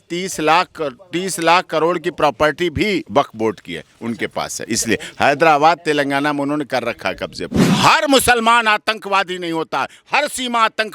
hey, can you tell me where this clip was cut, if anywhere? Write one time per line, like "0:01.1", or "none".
0:03.1
0:07.6